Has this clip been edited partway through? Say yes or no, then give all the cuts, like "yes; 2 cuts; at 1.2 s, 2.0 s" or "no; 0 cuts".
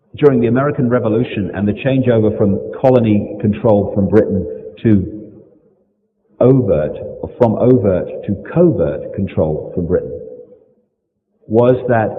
no; 0 cuts